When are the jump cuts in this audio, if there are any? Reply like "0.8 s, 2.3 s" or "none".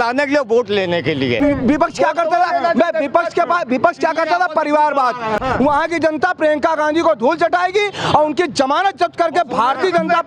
1.4 s, 5.4 s